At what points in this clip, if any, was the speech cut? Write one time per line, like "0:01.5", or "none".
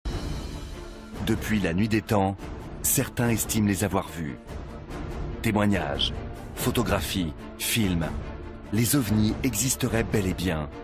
none